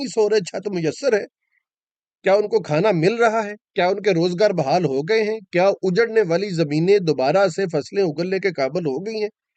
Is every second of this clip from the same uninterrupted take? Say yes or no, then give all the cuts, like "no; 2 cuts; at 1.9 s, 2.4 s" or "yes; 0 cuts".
yes; 0 cuts